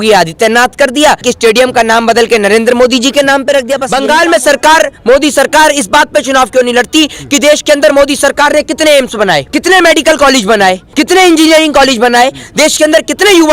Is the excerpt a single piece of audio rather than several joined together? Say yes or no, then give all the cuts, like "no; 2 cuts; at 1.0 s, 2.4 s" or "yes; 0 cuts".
no; 4 cuts; at 1.2 s, 3.9 s, 9.5 s, 10.9 s